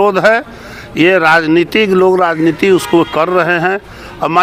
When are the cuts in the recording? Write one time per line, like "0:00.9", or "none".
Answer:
none